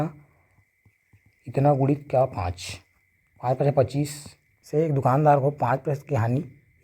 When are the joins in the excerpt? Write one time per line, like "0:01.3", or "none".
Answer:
0:04.5